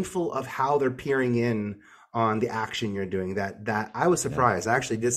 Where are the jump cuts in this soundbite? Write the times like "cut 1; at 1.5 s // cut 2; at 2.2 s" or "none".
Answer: none

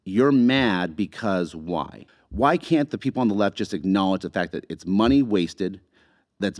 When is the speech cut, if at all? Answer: cut 1; at 1.9 s

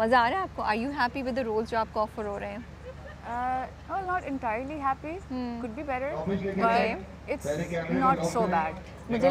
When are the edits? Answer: none

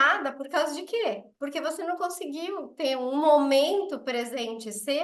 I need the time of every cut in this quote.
cut 1; at 1.3 s

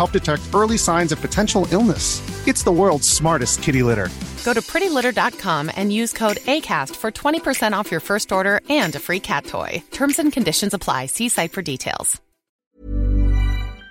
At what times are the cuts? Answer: cut 1; at 12.8 s

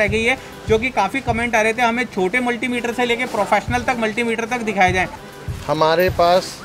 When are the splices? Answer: cut 1; at 5.2 s

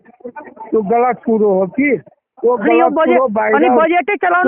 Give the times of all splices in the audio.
none

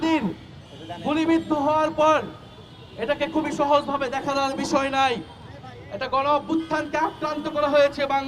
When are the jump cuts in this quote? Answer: none

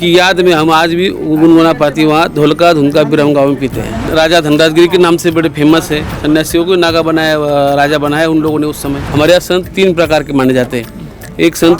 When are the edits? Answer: cut 1; at 4.1 s // cut 2; at 6.1 s // cut 3; at 9.0 s

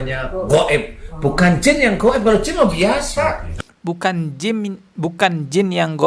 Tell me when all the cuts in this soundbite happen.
none

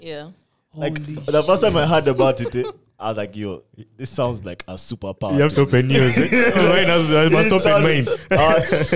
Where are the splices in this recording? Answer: none

